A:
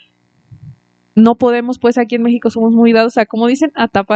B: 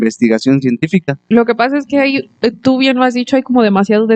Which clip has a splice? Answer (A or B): B